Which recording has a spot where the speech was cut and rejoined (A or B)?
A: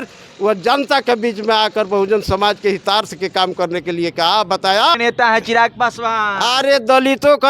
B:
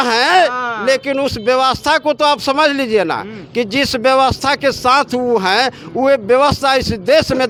A